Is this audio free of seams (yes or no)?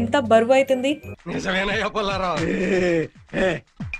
yes